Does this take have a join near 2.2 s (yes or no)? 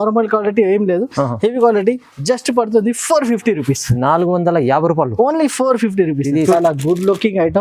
no